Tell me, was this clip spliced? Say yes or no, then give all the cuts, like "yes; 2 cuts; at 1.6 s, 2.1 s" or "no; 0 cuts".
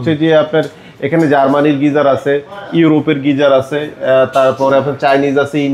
no; 0 cuts